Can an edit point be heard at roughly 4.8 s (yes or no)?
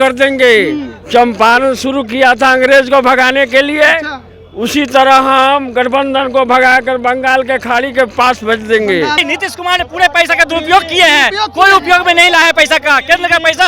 no